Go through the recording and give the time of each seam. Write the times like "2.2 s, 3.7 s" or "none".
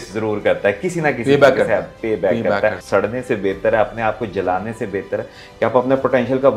2.8 s